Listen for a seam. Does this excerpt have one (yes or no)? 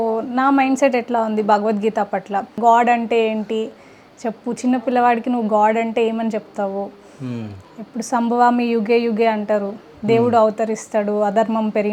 yes